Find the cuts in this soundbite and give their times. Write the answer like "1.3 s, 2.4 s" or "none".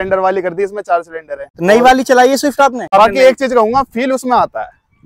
1.5 s, 2.9 s